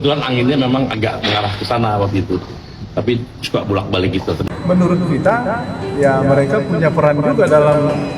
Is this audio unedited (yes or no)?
no